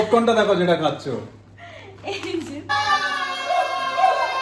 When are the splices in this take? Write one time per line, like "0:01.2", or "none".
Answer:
0:02.7